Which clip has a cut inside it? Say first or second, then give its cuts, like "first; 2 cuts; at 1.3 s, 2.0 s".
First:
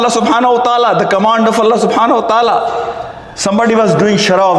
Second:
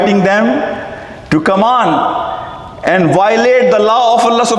first; 1 cut; at 3.3 s